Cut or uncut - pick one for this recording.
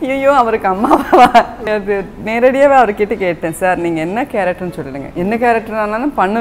cut